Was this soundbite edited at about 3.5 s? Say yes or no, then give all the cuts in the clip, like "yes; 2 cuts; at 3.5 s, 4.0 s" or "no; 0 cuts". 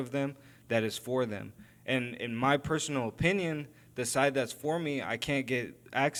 no; 0 cuts